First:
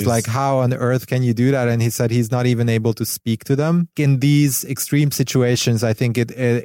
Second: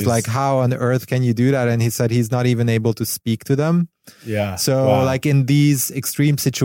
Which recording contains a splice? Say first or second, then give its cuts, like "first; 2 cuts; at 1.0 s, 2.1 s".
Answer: first; 1 cut; at 3.9 s